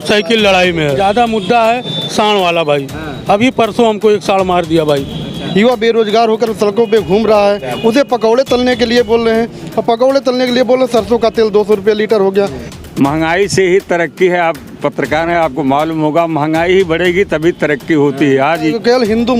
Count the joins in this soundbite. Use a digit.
4